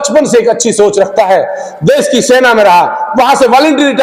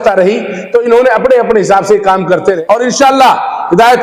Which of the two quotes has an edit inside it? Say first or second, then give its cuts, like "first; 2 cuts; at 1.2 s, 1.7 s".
second; 1 cut; at 2.6 s